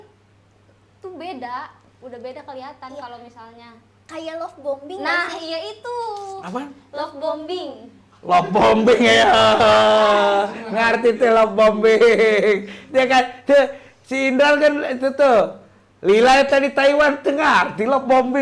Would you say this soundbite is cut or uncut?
uncut